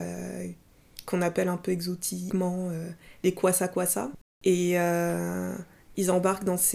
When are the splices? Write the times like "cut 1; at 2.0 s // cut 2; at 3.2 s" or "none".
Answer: cut 1; at 2.2 s // cut 2; at 4.2 s